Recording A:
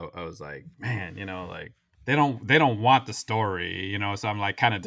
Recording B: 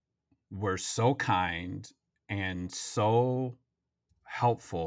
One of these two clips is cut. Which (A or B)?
A